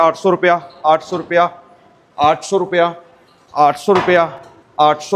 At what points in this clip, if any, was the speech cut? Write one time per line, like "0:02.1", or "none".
none